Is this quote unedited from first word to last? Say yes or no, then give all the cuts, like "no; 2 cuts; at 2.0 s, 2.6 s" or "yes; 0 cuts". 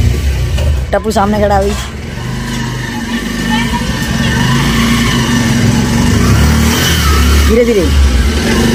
yes; 0 cuts